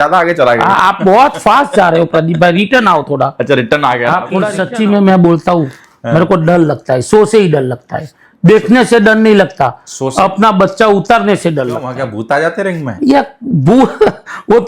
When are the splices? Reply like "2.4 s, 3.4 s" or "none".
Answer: 4.5 s, 11.9 s